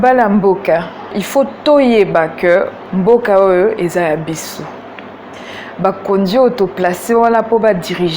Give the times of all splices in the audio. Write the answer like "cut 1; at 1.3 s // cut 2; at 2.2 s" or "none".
cut 1; at 1.2 s

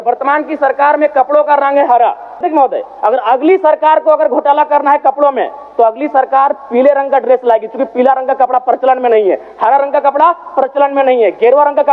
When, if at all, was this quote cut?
cut 1; at 2.4 s

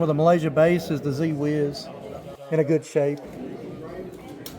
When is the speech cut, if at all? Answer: none

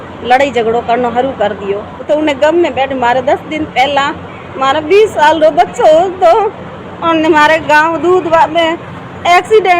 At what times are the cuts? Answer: cut 1; at 2.1 s

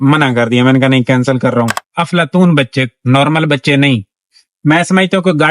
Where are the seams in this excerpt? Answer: cut 1; at 1.8 s

